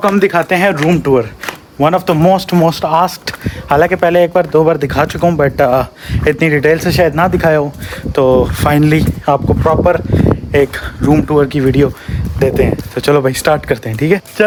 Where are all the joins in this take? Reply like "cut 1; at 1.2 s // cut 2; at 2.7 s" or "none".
none

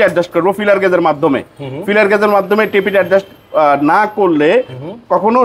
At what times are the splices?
none

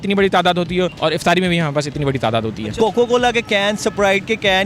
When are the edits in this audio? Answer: cut 1; at 0.9 s // cut 2; at 2.7 s

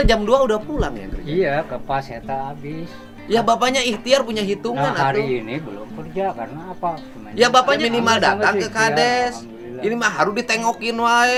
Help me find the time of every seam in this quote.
none

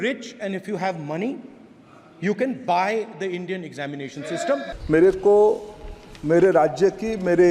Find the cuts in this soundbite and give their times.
cut 1; at 4.7 s

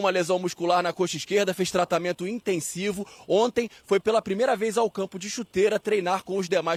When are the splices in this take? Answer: none

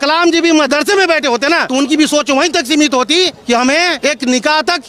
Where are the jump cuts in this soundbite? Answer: cut 1; at 1.6 s // cut 2; at 4.0 s

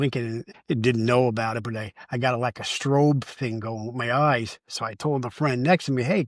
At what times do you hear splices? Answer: none

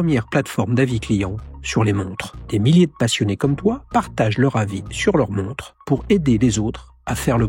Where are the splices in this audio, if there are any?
none

